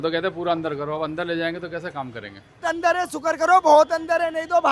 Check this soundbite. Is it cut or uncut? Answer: cut